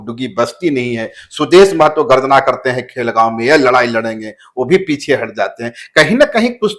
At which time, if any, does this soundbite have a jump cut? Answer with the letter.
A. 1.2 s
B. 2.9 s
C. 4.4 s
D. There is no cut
D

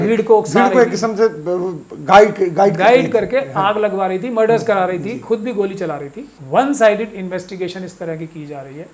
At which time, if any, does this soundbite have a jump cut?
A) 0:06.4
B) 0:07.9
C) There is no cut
A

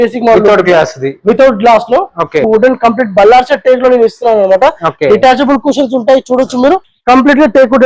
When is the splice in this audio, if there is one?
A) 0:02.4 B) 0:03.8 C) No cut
A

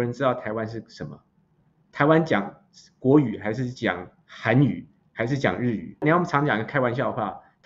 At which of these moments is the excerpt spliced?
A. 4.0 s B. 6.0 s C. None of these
B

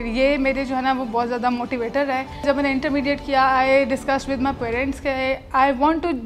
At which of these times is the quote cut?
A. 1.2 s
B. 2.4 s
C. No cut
B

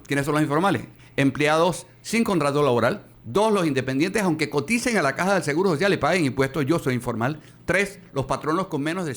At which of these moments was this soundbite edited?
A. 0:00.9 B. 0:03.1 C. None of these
B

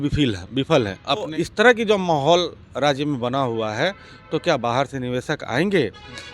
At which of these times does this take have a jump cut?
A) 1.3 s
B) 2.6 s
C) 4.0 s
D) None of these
A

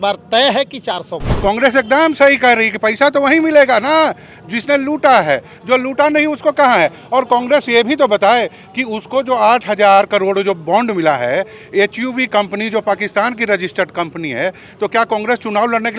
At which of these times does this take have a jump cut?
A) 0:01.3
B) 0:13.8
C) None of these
A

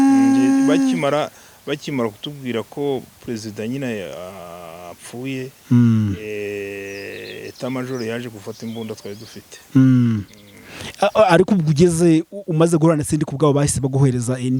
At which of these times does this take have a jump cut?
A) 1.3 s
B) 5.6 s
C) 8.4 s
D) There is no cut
D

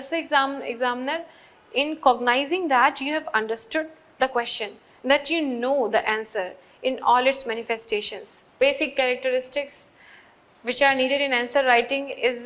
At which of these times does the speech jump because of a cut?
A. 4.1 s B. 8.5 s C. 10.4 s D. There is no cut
B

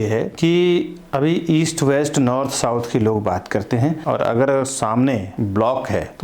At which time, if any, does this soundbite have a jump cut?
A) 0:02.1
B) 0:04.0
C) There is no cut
B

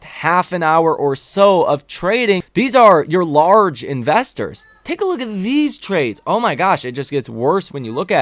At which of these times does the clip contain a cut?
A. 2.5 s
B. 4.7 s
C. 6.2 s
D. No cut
A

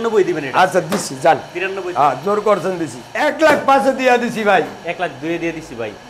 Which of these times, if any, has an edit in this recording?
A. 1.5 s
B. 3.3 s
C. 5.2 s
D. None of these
B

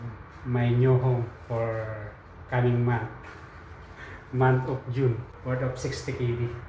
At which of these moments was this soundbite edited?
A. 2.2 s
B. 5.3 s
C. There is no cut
B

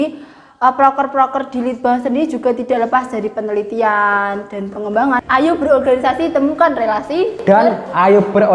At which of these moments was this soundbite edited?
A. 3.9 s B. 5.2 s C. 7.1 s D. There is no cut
B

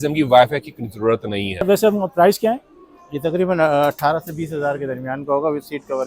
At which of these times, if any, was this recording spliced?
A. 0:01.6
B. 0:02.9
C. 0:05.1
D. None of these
A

